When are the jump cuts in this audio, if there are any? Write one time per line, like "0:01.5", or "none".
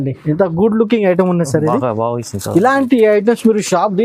none